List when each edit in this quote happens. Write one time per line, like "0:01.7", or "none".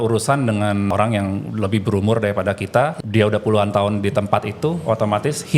0:00.9
0:03.0